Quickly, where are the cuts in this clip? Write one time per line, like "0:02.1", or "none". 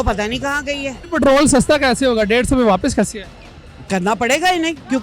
0:01.0